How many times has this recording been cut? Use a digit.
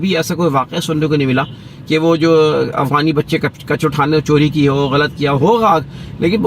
0